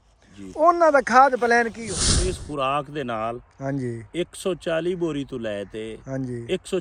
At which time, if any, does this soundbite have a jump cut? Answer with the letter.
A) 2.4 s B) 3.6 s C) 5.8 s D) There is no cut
A